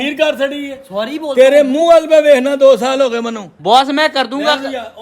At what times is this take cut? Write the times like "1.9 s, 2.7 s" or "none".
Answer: 3.5 s